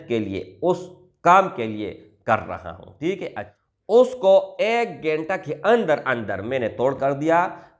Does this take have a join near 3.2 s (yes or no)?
yes